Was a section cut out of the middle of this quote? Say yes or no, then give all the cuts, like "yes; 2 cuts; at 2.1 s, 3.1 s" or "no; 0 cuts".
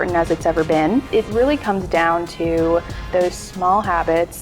yes; 1 cut; at 1.1 s